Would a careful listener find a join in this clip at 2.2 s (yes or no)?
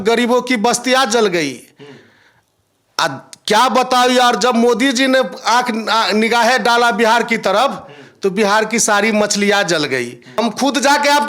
no